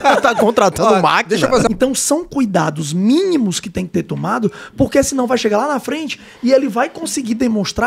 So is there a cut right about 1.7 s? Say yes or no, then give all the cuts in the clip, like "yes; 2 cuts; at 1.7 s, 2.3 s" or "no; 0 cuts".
yes; 1 cut; at 1.7 s